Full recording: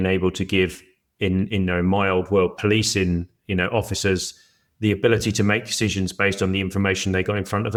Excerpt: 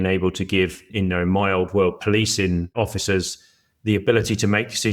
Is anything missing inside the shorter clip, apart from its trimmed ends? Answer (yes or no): yes